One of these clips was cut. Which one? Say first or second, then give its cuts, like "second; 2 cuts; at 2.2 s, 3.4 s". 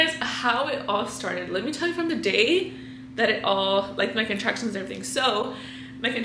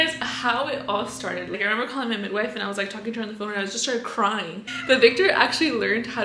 second; 2 cuts; at 1.5 s, 4.7 s